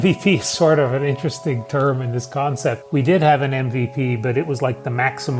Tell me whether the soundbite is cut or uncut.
cut